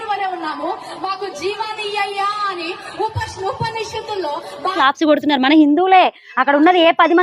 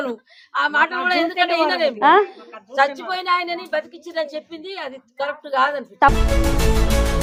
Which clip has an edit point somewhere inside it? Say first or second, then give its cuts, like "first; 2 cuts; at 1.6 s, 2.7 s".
first; 1 cut; at 4.7 s